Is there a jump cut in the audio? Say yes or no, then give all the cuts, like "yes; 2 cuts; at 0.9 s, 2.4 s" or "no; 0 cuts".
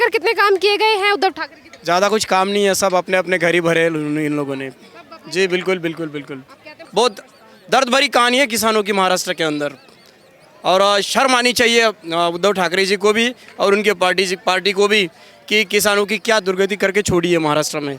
yes; 1 cut; at 6.8 s